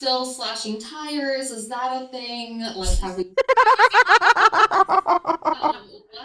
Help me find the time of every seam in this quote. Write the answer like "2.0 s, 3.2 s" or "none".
none